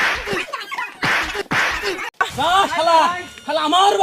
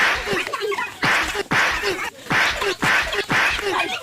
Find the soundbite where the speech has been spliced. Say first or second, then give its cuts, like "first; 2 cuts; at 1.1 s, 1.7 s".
first; 1 cut; at 2.2 s